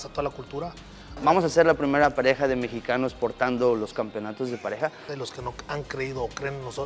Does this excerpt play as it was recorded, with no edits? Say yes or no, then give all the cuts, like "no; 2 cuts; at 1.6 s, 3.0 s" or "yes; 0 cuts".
no; 2 cuts; at 1.3 s, 5.1 s